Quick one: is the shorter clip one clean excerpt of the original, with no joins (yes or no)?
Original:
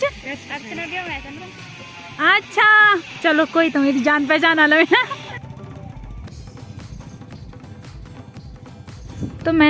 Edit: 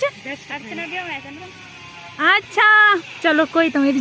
yes